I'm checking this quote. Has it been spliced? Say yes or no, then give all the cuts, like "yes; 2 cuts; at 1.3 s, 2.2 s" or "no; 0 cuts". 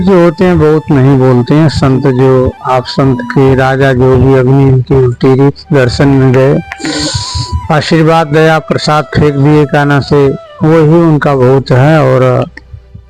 no; 0 cuts